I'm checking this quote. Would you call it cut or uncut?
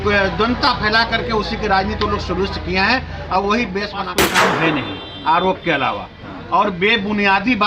cut